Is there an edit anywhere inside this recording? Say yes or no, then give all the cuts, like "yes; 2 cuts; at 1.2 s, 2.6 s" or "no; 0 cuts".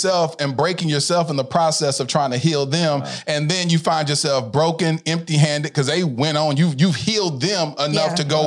no; 0 cuts